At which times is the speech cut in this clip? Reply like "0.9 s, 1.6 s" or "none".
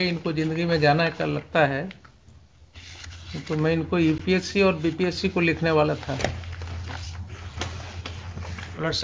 none